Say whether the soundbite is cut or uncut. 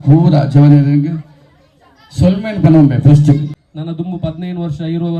cut